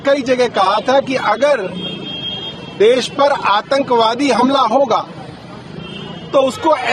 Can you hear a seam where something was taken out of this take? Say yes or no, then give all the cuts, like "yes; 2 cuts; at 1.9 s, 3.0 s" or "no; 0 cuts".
no; 0 cuts